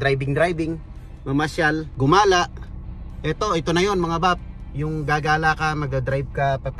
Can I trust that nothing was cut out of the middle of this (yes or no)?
no